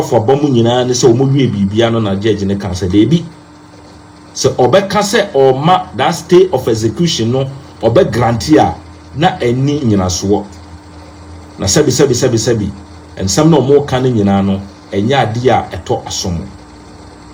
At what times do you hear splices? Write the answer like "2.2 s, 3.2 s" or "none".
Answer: none